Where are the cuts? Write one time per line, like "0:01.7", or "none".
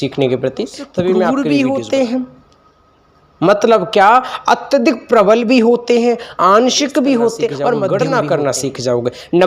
0:01.3
0:07.8